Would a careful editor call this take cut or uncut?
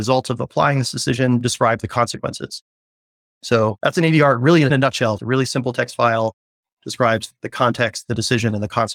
cut